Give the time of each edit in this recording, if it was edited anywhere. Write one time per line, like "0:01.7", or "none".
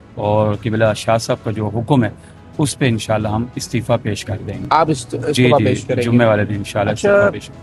none